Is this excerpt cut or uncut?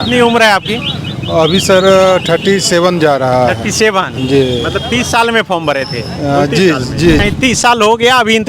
cut